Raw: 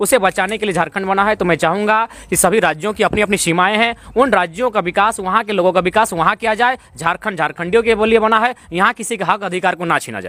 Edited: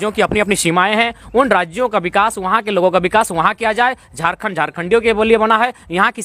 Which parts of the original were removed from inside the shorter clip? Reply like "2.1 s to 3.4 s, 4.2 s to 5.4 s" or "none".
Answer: none